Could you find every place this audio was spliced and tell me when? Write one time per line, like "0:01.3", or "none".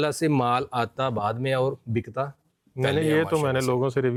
none